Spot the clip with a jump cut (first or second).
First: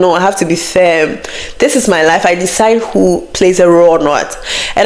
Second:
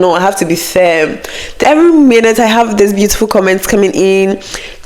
second